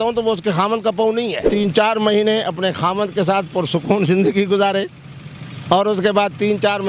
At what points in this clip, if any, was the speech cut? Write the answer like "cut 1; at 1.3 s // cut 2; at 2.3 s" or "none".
cut 1; at 1.4 s

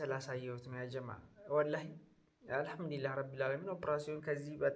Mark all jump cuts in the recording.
none

